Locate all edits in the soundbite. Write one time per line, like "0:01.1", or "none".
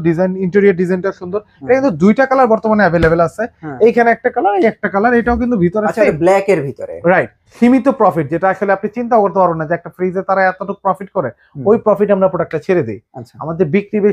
0:07.4

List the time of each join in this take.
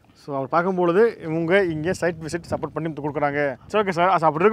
0:03.6

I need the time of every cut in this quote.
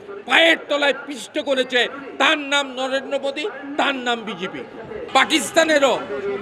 0:04.9

